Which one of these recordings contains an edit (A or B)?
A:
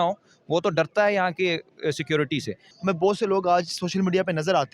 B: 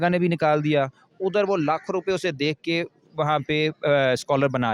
A